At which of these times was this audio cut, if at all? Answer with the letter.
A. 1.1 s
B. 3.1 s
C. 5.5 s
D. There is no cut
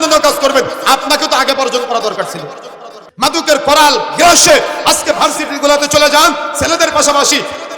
B